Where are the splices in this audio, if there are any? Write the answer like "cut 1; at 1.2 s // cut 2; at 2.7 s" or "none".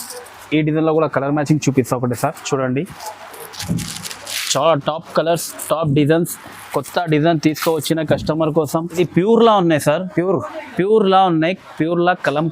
cut 1; at 9.0 s